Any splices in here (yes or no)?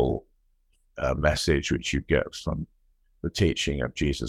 no